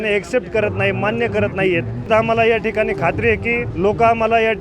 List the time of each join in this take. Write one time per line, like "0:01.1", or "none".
0:02.1
0:03.7